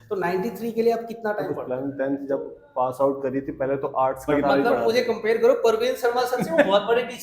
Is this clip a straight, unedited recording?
no; 2 cuts; at 1.6 s, 4.3 s

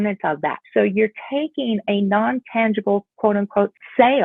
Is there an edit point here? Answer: no; 0 cuts

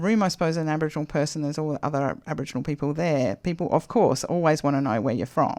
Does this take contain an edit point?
no; 0 cuts

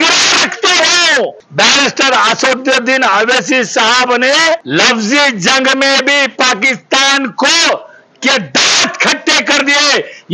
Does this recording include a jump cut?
yes; 2 cuts; at 1.4 s, 4.6 s

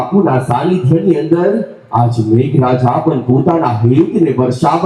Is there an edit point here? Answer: no; 0 cuts

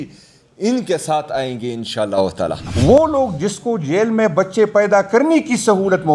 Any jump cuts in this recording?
yes; 1 cut; at 2.6 s

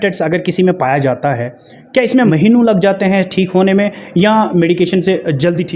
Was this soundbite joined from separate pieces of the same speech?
no; 0 cuts

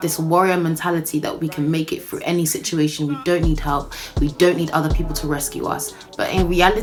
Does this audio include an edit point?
no; 0 cuts

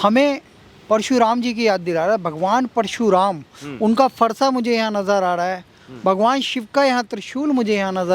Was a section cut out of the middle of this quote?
no; 0 cuts

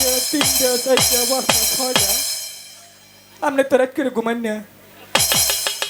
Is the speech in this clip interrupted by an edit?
no; 0 cuts

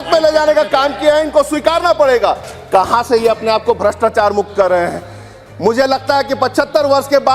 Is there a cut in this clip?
yes; 1 cut; at 2.5 s

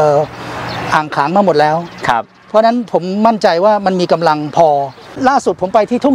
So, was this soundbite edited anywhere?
no; 0 cuts

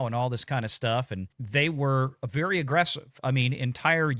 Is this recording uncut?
yes; 0 cuts

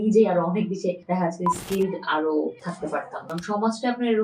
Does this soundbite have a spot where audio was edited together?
yes; 2 cuts; at 1.0 s, 3.2 s

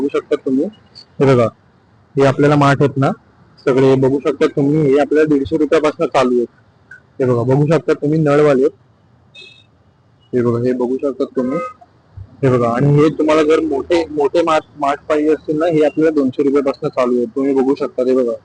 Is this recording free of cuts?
yes; 0 cuts

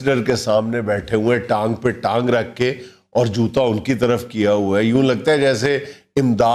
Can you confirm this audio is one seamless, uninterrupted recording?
yes; 0 cuts

